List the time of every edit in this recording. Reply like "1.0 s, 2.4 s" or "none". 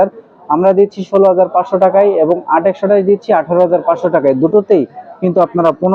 none